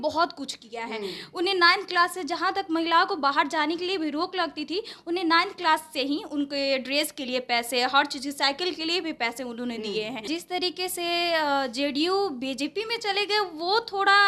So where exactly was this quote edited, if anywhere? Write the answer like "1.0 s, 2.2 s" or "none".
10.3 s